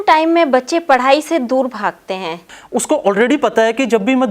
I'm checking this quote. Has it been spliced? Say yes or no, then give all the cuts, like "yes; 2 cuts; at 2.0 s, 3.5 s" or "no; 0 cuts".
yes; 1 cut; at 2.5 s